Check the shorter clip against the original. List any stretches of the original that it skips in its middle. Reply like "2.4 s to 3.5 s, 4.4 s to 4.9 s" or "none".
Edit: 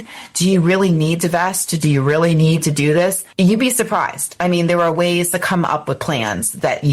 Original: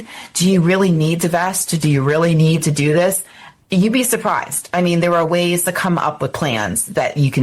3.2 s to 3.6 s